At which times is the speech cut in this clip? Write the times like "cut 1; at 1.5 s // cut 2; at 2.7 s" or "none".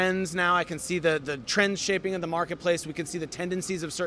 cut 1; at 1.4 s